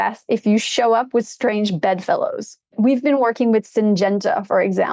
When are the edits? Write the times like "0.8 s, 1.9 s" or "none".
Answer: 2.7 s